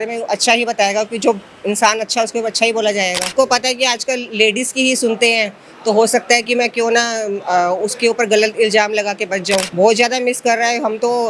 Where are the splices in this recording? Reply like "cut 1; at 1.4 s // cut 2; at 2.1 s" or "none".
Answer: cut 1; at 3.4 s // cut 2; at 9.7 s